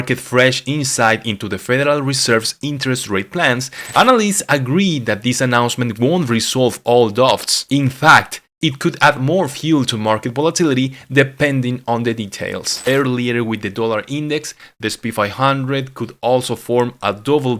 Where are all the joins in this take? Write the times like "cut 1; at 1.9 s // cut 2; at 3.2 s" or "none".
cut 1; at 3.8 s // cut 2; at 12.8 s